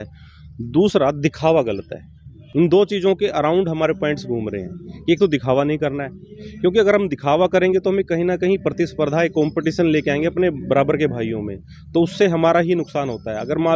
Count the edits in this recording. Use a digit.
0